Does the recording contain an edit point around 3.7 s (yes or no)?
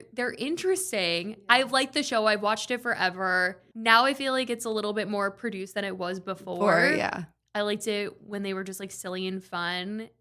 yes